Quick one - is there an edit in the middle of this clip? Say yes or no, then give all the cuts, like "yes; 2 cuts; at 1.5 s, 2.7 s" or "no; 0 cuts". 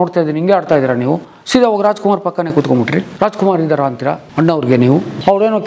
no; 0 cuts